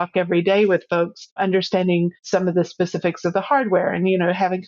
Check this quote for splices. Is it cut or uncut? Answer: cut